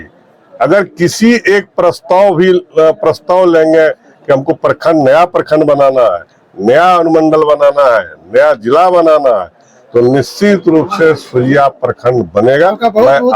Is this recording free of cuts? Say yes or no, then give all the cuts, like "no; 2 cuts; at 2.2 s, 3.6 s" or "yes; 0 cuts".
yes; 0 cuts